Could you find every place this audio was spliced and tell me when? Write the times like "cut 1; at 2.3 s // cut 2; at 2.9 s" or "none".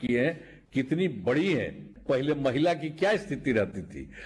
cut 1; at 1.9 s